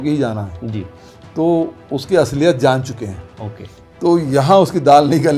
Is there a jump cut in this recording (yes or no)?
no